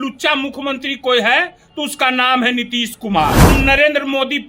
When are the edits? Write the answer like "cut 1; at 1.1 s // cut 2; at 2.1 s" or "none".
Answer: cut 1; at 3.5 s